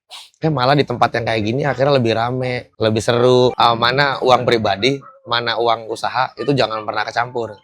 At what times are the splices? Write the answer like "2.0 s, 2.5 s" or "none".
3.5 s